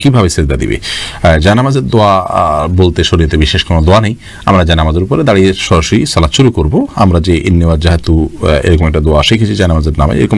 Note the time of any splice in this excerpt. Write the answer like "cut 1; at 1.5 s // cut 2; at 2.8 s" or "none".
none